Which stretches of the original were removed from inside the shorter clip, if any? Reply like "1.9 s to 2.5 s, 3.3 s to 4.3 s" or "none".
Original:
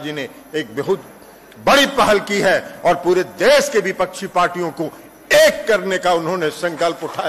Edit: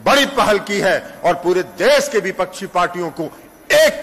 none